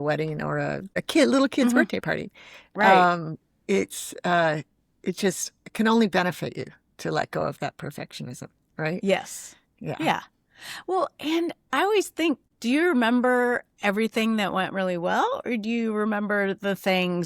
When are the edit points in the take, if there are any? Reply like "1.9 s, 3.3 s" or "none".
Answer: 1.0 s, 12.5 s